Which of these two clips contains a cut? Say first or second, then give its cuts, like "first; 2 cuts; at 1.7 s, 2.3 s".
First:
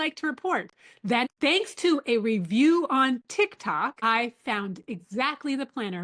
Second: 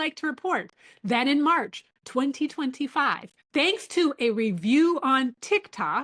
first; 1 cut; at 1.2 s